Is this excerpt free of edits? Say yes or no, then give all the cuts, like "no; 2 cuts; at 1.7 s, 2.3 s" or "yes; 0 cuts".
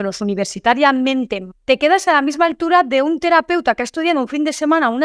no; 1 cut; at 1.4 s